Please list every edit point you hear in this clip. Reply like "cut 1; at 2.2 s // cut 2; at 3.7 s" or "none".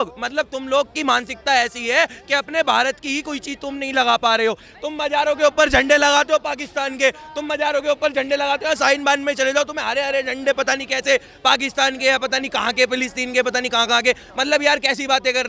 none